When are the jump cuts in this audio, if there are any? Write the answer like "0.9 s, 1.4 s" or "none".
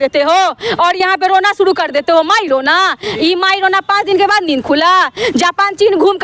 none